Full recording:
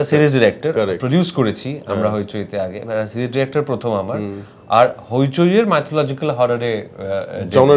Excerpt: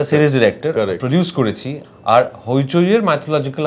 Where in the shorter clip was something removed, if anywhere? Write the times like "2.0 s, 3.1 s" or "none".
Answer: 1.8 s